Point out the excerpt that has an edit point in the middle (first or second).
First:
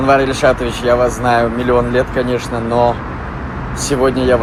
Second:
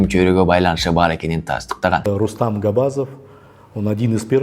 second